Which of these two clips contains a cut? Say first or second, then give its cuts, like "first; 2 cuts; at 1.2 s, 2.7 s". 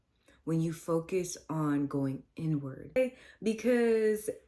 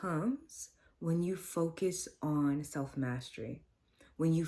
first; 1 cut; at 3.0 s